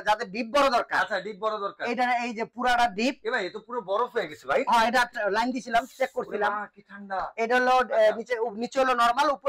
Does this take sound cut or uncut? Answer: uncut